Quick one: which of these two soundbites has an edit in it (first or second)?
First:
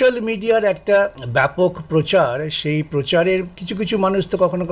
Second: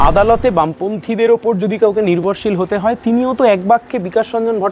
first